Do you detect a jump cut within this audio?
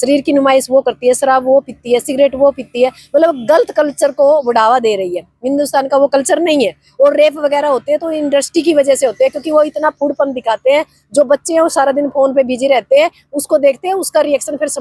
no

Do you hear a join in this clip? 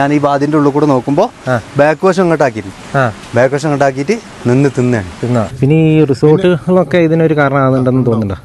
yes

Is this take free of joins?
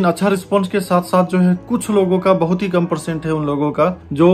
yes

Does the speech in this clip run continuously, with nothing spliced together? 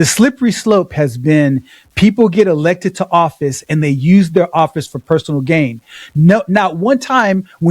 yes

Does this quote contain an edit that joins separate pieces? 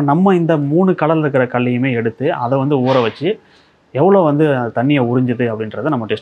no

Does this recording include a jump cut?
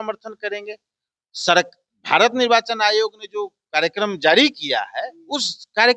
no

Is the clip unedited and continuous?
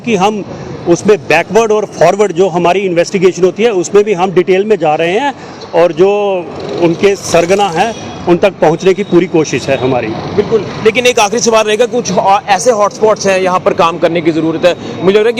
yes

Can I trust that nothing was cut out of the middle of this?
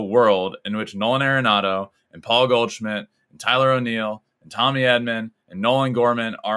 yes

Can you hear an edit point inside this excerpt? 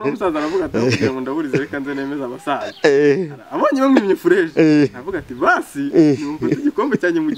no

